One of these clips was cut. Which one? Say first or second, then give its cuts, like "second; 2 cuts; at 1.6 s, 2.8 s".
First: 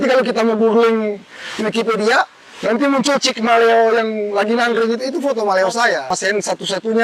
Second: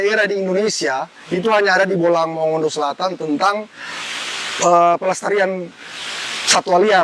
first; 1 cut; at 6.1 s